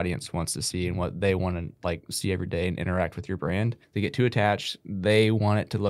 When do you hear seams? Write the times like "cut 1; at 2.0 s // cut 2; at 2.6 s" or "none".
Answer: cut 1; at 3.8 s

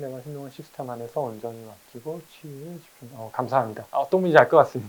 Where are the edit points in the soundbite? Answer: none

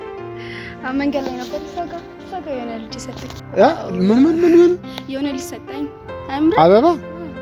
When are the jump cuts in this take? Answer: none

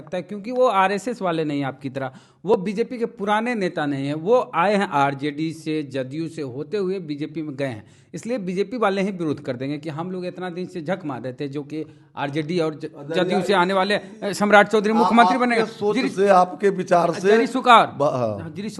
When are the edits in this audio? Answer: none

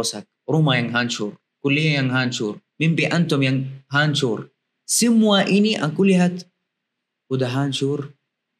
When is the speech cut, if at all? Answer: none

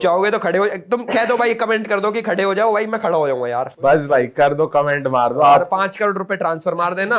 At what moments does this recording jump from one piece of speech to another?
none

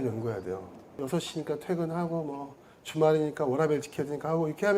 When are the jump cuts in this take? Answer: cut 1; at 1.0 s

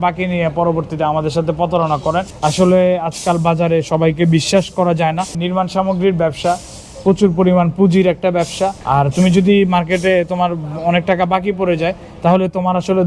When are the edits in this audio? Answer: cut 1; at 2.3 s // cut 2; at 8.8 s

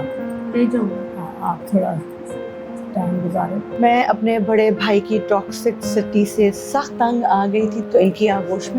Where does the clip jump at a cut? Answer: cut 1; at 3.7 s // cut 2; at 7.8 s

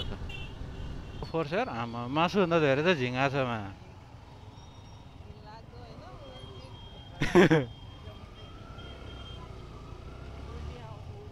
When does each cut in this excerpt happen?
cut 1; at 1.3 s

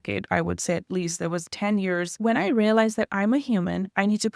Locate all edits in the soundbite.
cut 1; at 2.2 s

